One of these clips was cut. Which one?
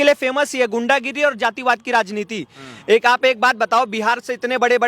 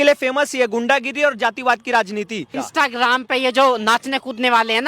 second; 1 cut; at 2.6 s

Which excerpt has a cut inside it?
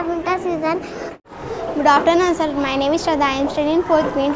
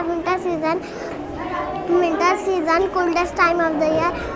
first; 1 cut; at 1.4 s

